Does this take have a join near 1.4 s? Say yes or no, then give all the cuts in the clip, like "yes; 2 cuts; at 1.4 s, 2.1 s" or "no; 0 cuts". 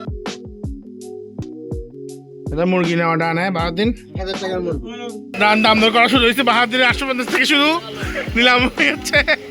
yes; 2 cuts; at 1.4 s, 5.3 s